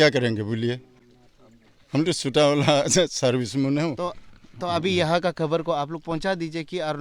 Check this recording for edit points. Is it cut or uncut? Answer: uncut